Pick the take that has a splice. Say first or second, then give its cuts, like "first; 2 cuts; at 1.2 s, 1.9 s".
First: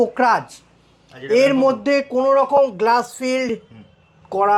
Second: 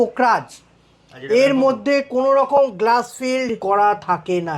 second; 1 cut; at 3.6 s